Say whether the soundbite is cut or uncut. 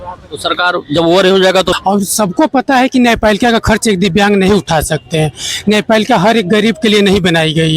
cut